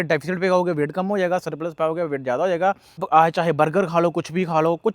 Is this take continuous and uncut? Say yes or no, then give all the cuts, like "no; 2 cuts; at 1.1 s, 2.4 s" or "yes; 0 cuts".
no; 1 cut; at 3.0 s